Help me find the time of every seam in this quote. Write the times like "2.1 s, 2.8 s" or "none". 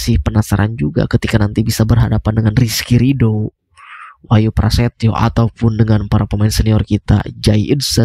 none